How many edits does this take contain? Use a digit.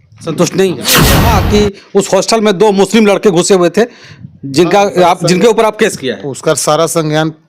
1